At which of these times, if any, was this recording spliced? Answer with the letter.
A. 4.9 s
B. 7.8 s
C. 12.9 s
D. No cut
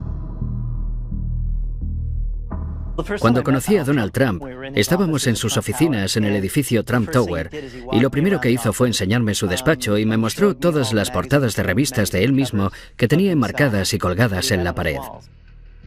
B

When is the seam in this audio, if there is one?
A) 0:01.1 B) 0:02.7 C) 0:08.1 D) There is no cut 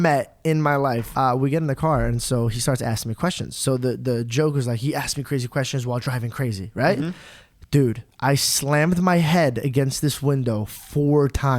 A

